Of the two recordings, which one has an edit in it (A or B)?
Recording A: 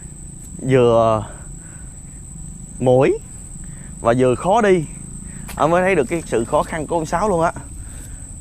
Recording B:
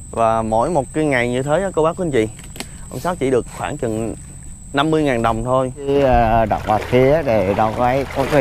B